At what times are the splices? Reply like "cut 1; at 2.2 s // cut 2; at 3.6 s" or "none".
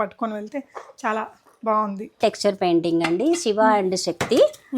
cut 1; at 2.2 s